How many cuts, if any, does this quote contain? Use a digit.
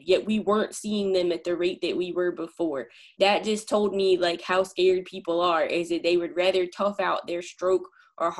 1